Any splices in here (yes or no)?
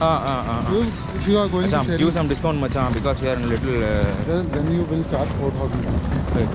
no